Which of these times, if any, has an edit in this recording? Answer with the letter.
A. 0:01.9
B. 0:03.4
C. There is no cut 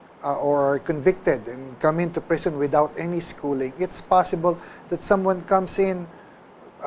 A